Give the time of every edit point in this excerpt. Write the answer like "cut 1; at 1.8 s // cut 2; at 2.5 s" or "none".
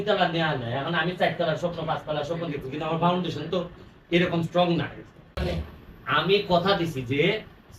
cut 1; at 5.4 s